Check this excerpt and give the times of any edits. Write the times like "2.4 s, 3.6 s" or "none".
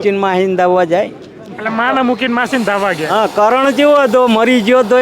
none